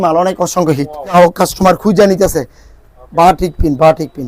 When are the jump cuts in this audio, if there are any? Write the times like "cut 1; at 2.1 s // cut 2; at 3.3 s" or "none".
cut 1; at 1.1 s